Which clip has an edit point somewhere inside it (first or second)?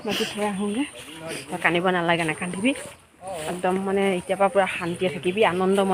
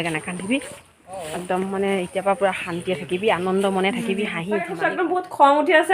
second